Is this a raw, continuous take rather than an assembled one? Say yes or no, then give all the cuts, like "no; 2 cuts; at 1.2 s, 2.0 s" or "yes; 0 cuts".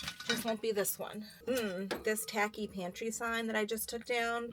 no; 1 cut; at 1.3 s